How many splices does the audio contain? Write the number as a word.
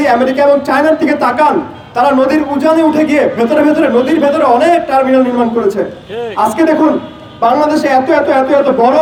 zero